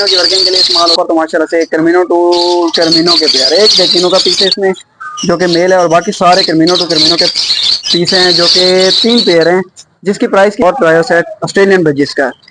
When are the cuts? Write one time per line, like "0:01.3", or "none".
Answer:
0:00.9
0:10.6